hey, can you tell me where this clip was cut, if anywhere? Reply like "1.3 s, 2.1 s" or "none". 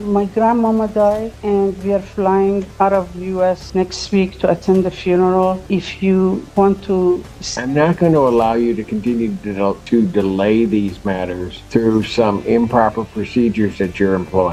none